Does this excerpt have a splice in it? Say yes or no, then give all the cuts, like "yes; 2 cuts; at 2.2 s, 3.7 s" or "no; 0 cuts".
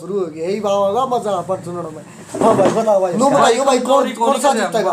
yes; 1 cut; at 3.1 s